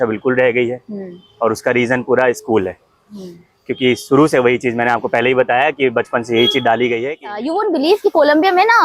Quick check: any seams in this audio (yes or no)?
yes